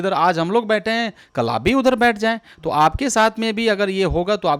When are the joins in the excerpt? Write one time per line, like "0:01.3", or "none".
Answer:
none